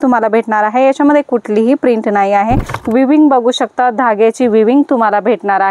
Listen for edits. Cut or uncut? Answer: cut